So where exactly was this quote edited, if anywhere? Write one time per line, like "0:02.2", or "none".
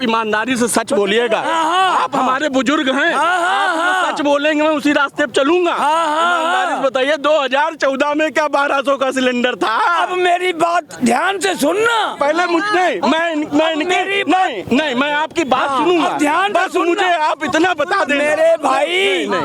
none